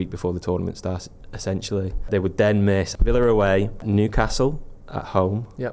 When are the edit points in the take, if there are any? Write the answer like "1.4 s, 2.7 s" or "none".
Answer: 2.1 s, 2.9 s, 3.8 s